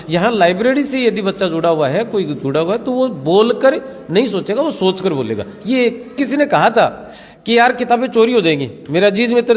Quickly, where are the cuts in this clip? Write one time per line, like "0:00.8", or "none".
0:06.2